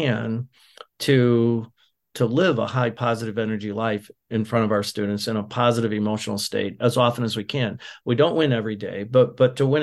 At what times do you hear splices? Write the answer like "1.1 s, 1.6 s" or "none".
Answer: 2.0 s, 3.0 s

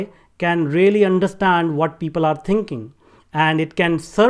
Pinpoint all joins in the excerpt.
none

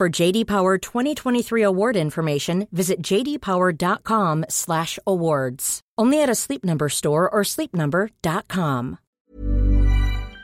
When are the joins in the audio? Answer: 9.2 s

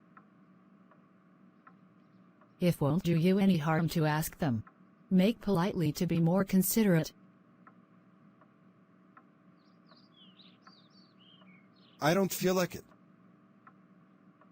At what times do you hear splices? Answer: 1.0 s

